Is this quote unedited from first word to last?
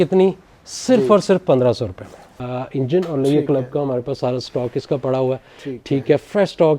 no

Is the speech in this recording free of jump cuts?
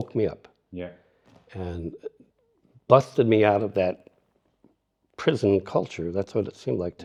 yes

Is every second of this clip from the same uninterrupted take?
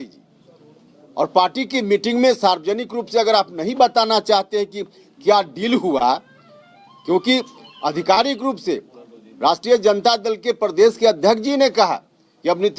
yes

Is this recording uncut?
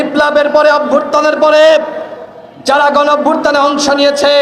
yes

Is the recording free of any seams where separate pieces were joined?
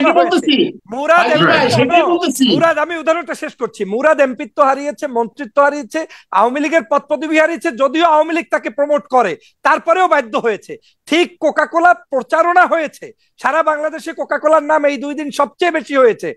yes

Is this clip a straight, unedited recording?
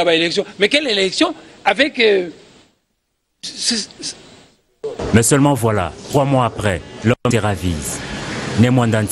yes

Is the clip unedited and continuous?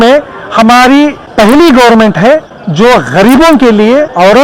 no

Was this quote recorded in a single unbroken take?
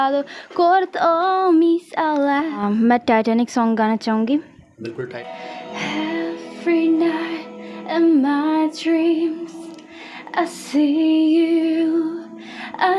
no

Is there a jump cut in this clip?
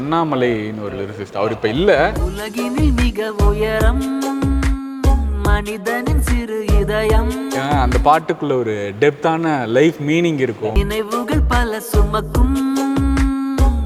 no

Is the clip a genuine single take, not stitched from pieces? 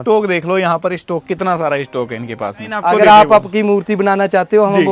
no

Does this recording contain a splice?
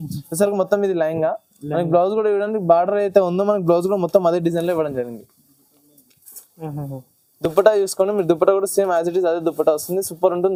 no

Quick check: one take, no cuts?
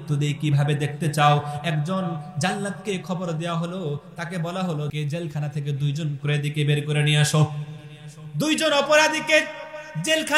no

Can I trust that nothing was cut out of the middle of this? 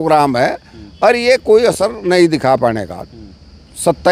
yes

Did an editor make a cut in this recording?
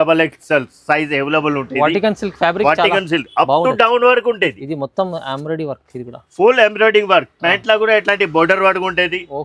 no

